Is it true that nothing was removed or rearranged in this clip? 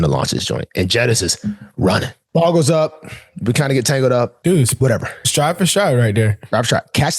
no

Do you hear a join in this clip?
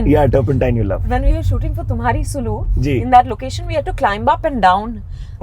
yes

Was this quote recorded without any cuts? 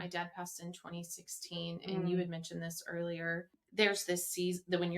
no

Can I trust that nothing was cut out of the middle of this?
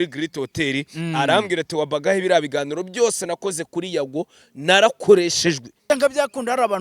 no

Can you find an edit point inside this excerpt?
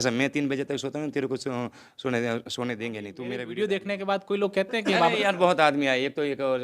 yes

